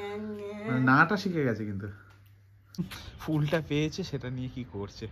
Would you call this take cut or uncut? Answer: cut